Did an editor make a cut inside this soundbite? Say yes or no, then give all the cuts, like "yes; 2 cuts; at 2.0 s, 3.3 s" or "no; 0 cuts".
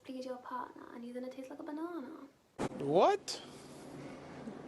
yes; 1 cut; at 2.7 s